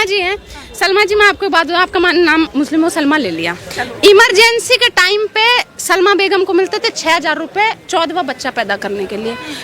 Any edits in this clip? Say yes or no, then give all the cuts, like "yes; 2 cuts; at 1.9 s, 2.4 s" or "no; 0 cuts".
no; 0 cuts